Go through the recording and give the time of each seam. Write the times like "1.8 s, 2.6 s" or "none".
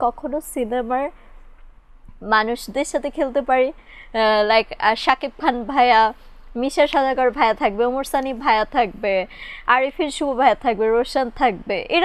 none